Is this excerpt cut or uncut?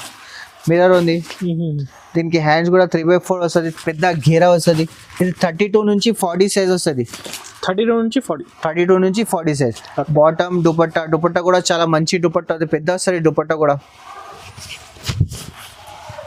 uncut